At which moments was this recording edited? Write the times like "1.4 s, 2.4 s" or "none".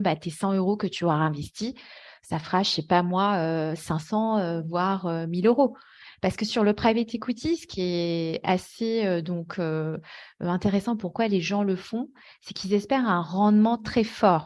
none